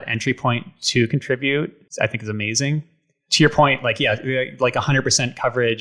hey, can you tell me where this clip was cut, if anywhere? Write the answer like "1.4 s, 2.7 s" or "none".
1.8 s